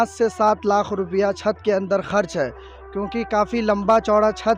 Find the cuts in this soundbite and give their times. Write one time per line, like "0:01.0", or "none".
none

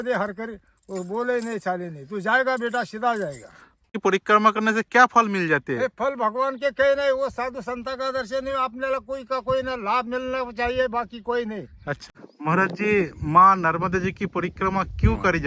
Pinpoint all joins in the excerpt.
0:03.9
0:12.0

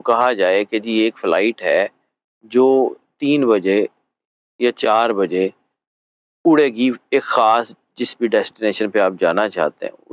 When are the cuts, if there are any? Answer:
none

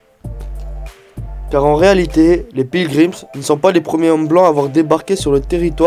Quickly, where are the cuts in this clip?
none

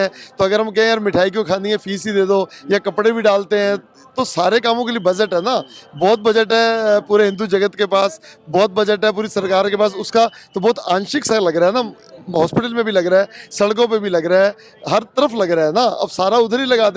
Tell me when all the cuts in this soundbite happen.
none

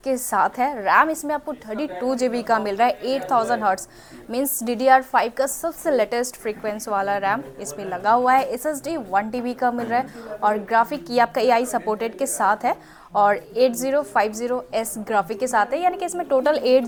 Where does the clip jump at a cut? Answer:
none

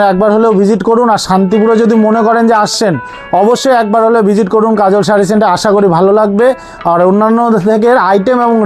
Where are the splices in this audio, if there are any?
none

